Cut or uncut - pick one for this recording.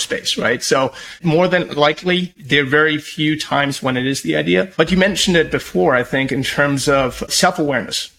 cut